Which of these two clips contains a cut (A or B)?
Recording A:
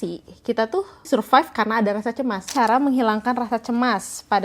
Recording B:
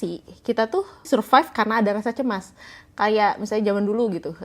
A